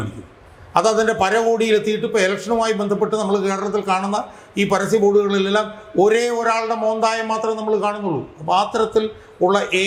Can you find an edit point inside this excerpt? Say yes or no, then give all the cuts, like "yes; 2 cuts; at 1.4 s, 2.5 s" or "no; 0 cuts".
no; 0 cuts